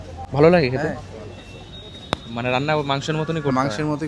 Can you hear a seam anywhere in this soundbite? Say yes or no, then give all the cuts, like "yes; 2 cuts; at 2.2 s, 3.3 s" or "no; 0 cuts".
no; 0 cuts